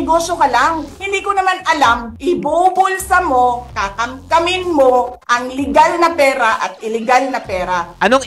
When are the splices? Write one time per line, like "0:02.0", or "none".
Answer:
0:00.9
0:02.1